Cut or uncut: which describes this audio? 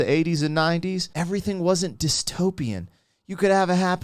cut